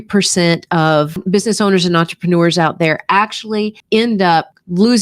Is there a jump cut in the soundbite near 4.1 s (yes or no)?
no